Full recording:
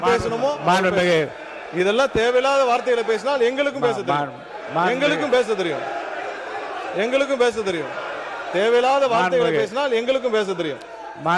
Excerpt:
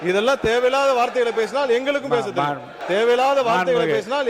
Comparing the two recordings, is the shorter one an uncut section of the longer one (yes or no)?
no